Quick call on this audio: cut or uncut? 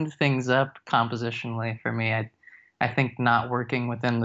uncut